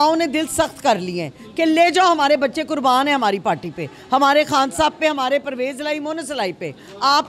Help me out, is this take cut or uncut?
uncut